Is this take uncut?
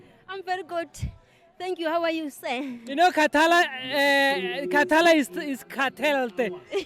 yes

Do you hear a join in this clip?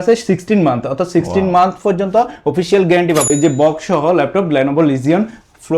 yes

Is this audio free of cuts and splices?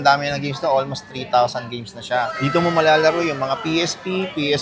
yes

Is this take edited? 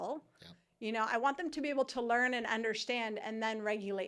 no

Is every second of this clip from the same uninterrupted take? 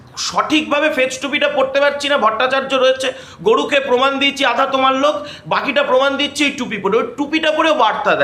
yes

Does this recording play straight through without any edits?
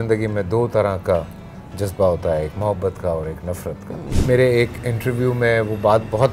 no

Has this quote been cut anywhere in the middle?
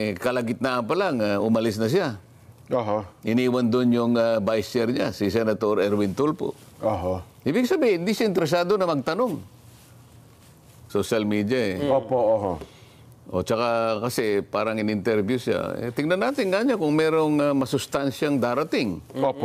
yes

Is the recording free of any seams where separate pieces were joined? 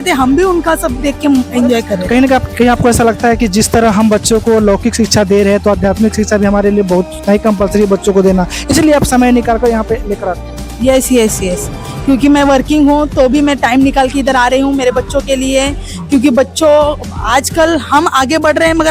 yes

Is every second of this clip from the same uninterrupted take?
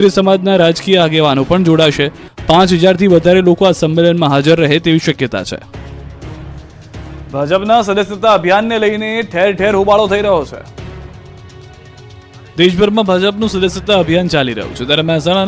yes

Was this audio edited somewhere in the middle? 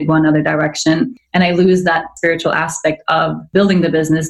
yes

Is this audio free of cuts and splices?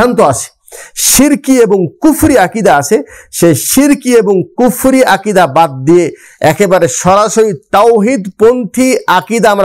yes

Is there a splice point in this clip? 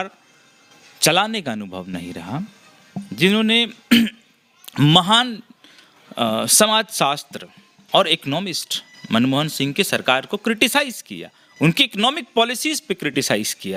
no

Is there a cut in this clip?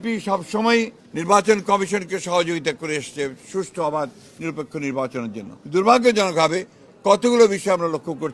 yes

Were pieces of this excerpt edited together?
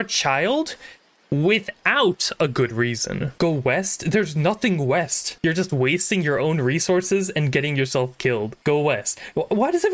yes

